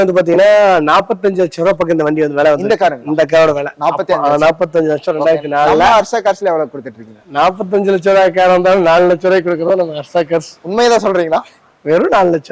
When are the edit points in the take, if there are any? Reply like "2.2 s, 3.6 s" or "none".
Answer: none